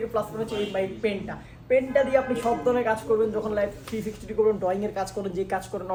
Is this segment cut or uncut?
uncut